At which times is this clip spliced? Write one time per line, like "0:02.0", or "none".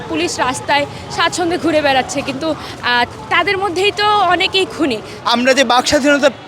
0:05.1